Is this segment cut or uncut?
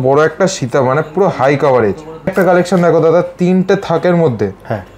cut